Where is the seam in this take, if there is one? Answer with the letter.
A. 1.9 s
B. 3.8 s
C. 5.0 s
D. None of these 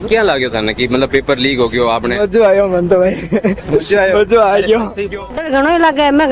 C